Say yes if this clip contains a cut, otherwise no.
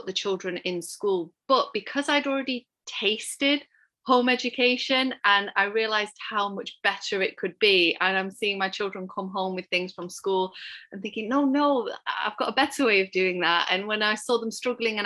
no